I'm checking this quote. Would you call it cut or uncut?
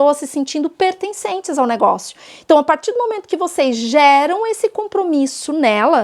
uncut